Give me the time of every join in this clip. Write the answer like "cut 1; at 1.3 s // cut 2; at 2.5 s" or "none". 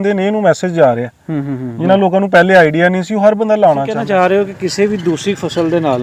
cut 1; at 3.9 s